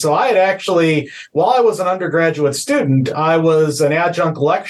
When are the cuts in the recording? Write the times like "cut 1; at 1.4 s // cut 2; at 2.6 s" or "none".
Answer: none